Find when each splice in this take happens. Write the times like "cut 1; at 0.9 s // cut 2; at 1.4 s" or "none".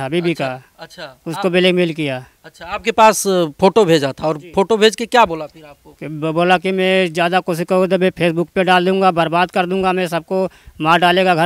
none